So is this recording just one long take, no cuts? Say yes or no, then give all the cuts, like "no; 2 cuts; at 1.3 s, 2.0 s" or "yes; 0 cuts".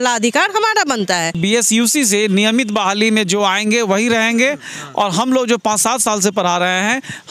no; 1 cut; at 1.4 s